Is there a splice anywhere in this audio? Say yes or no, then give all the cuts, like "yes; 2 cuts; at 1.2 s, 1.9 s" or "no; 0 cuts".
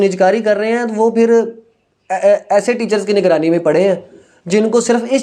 no; 0 cuts